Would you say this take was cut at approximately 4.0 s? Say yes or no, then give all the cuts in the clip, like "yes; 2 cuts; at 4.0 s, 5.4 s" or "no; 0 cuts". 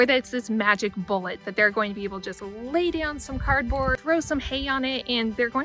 yes; 1 cut; at 4.0 s